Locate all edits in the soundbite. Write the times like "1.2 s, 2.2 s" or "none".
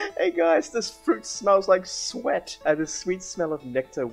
2.5 s

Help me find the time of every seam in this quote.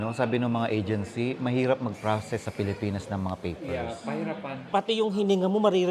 4.6 s

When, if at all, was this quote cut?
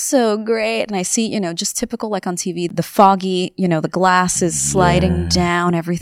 none

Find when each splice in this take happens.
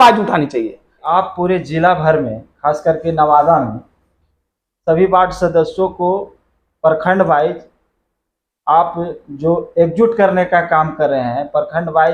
1.0 s

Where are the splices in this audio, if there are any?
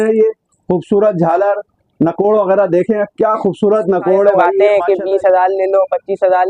4.5 s

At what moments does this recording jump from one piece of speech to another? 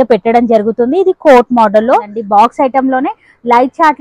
2.1 s

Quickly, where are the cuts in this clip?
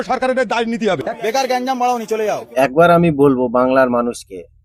1.1 s, 2.4 s

